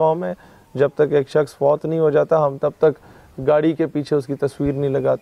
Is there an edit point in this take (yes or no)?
no